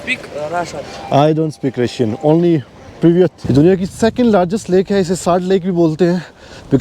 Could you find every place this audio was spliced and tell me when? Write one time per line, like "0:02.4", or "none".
0:03.4